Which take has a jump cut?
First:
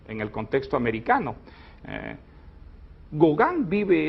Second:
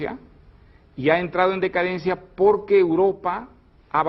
first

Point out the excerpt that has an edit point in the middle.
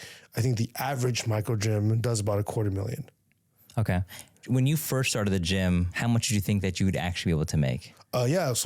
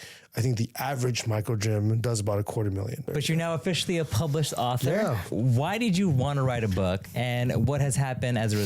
second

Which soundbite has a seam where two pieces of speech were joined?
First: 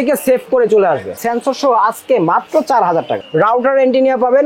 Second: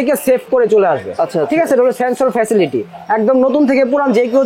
first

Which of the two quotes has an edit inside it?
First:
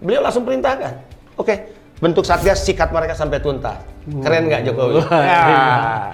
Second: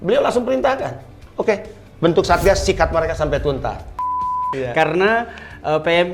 second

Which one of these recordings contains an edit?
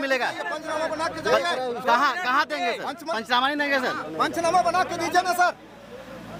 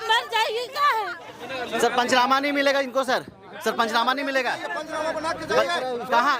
second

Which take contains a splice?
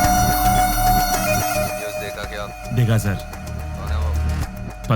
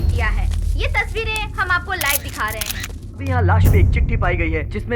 second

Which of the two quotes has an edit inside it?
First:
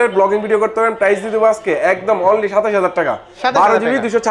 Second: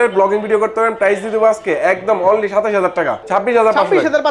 second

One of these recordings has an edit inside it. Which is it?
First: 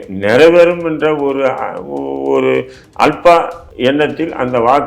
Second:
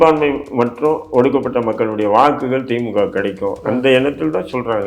first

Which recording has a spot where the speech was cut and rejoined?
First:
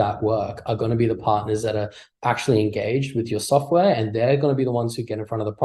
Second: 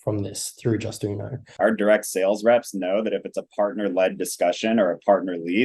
second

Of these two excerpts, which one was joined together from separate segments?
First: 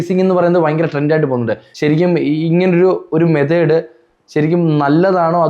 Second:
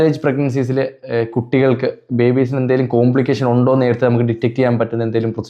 first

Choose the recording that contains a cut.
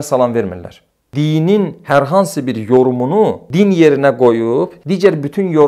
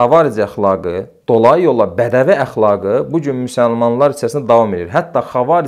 first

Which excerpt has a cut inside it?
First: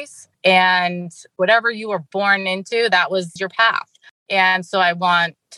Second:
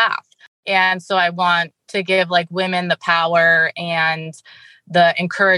first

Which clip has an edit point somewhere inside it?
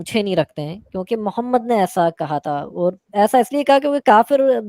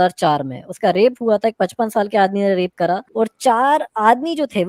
second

